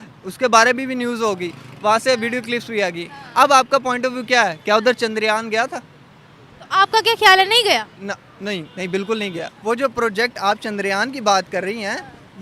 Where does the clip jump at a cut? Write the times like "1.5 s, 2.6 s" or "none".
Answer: 9.5 s